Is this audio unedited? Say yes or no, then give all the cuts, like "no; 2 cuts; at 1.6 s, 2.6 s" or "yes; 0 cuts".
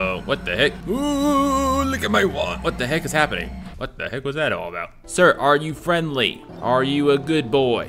no; 3 cuts; at 0.8 s, 3.6 s, 5.0 s